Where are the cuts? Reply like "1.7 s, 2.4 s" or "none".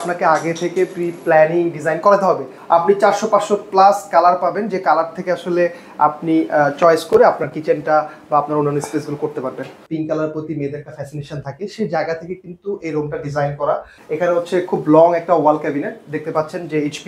2.5 s, 9.8 s, 14.0 s